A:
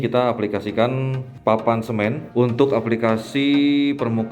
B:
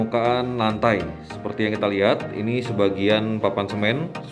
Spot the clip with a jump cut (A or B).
A